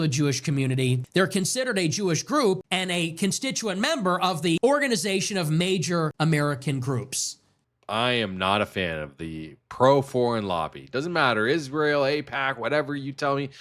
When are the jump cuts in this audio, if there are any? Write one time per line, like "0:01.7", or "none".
0:01.0
0:02.7
0:04.6
0:06.1
0:07.3